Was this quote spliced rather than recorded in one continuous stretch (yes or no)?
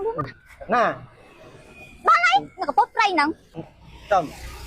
yes